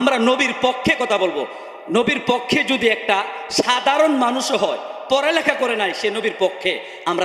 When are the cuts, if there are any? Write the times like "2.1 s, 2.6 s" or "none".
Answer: none